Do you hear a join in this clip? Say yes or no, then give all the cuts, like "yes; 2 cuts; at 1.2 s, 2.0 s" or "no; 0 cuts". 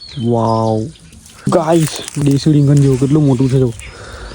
yes; 2 cuts; at 1.4 s, 2.2 s